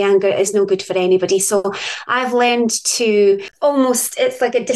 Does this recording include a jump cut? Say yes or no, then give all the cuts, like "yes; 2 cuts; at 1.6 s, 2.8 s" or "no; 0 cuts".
yes; 1 cut; at 3.5 s